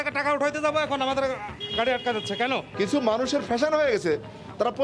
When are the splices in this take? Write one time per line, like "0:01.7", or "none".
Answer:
0:02.7